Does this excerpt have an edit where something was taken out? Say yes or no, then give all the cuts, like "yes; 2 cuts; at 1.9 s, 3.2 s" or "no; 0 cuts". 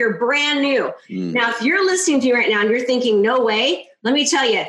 yes; 1 cut; at 1.0 s